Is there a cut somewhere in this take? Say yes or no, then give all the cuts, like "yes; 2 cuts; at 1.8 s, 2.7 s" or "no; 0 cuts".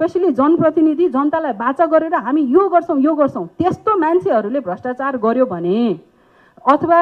no; 0 cuts